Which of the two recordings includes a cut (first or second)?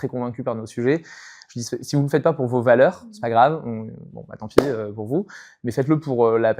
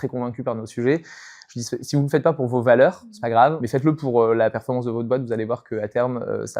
second